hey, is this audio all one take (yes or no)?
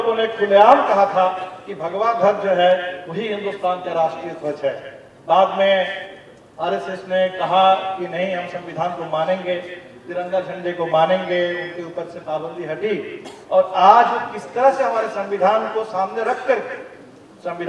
yes